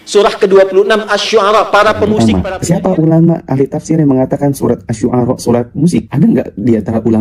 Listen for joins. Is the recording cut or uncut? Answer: cut